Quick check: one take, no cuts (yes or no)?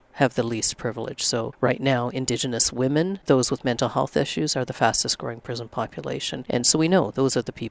no